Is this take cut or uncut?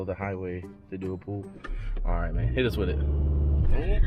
uncut